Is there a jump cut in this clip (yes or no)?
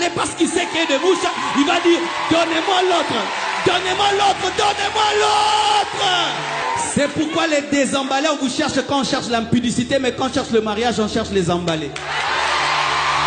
yes